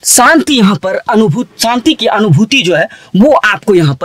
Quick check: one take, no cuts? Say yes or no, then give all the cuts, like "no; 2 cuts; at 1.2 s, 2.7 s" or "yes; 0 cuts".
yes; 0 cuts